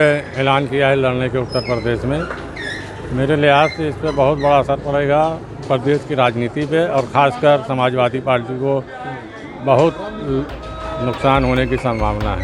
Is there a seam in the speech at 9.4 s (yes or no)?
no